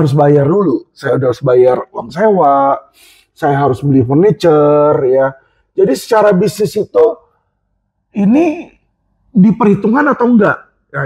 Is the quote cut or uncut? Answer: uncut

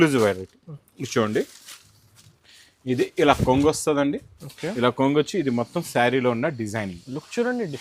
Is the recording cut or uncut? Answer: uncut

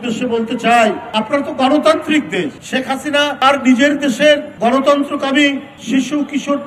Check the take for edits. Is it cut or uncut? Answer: cut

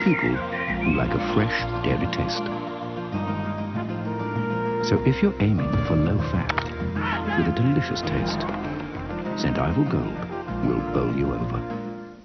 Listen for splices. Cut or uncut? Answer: cut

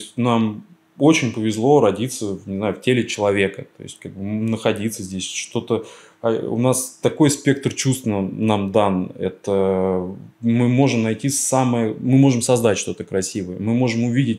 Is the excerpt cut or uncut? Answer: uncut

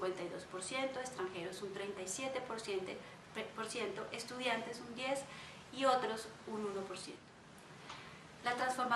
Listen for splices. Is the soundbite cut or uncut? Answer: uncut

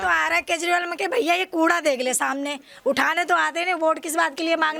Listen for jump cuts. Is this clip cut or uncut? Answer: uncut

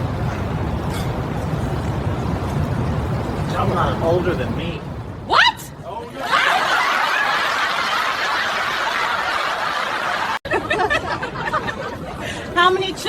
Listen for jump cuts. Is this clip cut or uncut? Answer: cut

